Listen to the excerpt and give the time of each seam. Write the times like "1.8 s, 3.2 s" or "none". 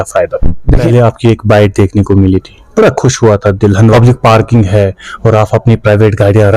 0.9 s, 3.9 s